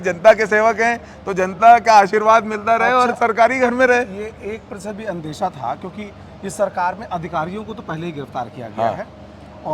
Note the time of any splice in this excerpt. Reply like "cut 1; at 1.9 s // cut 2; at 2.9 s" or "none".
none